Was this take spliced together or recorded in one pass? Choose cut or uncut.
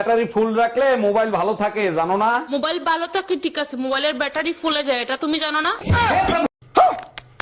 cut